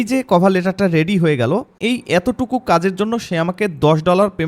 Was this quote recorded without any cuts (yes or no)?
no